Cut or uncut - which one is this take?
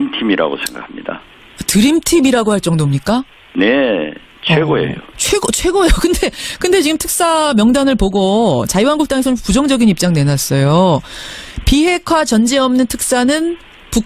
cut